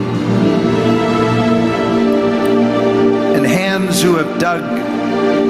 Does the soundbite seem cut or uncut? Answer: uncut